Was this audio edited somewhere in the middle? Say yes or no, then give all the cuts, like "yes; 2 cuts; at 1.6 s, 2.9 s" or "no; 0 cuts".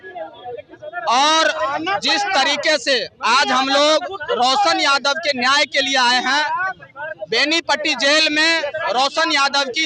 no; 0 cuts